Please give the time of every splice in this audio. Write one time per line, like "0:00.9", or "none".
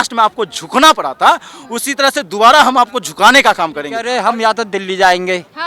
0:03.9